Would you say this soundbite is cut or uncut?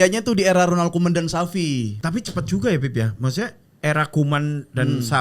cut